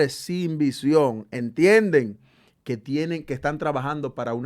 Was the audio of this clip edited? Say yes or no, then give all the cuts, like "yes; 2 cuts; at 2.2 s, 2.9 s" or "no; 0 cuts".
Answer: no; 0 cuts